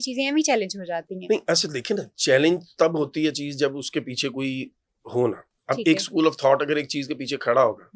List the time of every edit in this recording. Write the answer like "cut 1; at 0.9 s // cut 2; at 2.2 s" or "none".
none

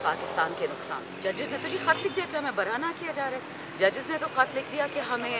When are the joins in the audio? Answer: cut 1; at 1.1 s

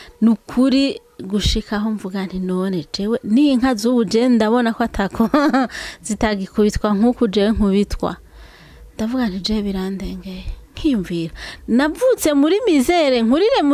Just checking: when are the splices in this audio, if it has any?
none

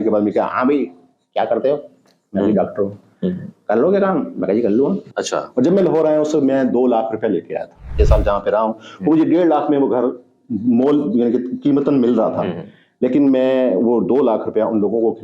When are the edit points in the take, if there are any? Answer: cut 1; at 5.1 s // cut 2; at 7.9 s

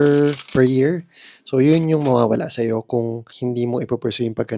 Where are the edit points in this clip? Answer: cut 1; at 3.3 s

